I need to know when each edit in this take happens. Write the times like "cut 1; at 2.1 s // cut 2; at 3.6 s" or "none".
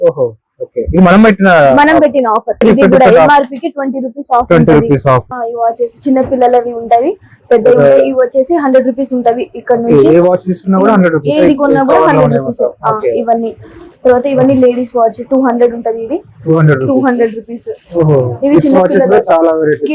cut 1; at 2.6 s // cut 2; at 5.3 s